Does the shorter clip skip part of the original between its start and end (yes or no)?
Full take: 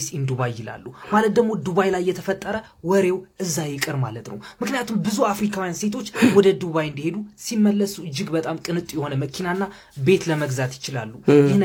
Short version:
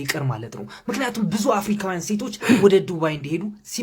no